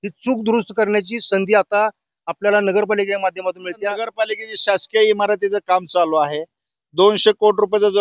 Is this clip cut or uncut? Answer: cut